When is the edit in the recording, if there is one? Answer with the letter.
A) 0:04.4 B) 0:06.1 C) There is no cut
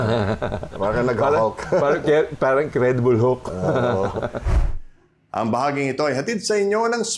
A